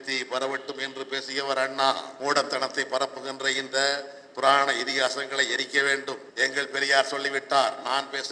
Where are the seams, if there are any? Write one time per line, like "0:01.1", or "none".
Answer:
0:02.1
0:06.3